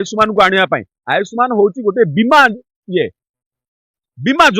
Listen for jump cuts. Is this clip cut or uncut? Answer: uncut